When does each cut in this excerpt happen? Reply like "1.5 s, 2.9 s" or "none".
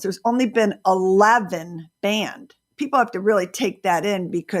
2.7 s